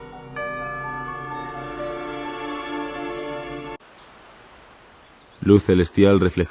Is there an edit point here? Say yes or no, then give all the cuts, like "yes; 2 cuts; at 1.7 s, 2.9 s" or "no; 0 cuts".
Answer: no; 0 cuts